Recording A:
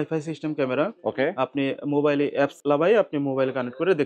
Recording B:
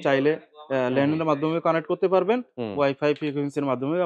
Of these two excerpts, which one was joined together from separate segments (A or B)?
A